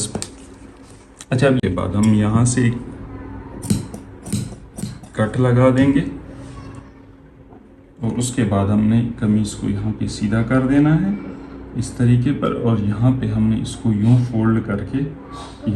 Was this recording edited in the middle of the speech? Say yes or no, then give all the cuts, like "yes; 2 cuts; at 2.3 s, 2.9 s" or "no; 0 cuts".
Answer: yes; 1 cut; at 1.6 s